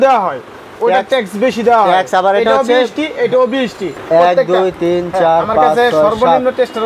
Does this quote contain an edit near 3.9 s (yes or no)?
yes